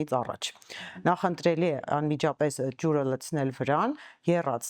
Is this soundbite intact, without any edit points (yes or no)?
yes